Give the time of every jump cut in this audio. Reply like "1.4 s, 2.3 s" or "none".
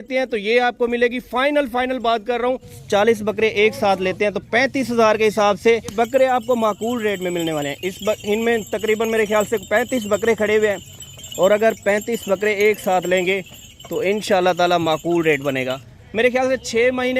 2.7 s, 5.9 s, 15.8 s